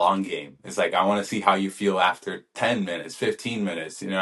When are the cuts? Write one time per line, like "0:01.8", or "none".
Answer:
none